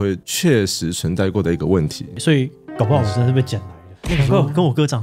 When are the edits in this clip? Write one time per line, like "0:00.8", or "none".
0:02.1